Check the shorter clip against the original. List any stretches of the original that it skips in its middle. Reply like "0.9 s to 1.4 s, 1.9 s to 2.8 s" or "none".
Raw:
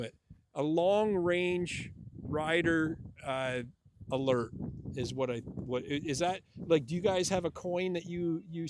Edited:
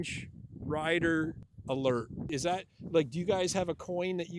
3.1 s to 3.9 s, 4.7 s to 6.0 s